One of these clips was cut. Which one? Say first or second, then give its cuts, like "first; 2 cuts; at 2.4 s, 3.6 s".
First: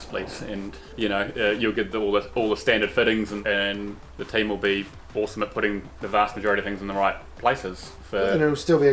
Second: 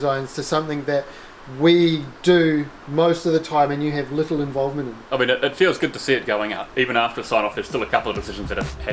first; 2 cuts; at 0.9 s, 3.4 s